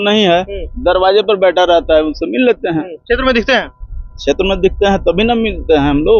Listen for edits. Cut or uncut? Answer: uncut